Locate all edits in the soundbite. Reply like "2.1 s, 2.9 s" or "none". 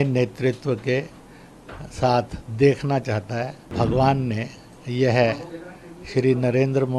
3.7 s